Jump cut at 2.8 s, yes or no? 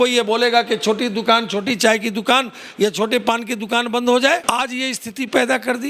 no